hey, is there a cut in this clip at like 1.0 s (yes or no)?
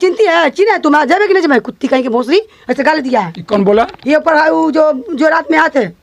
no